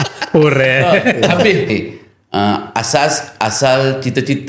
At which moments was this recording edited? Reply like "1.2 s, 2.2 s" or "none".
1.7 s